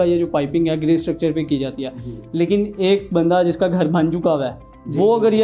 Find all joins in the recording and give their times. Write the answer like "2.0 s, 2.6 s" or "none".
none